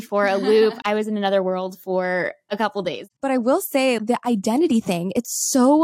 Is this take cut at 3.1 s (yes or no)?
yes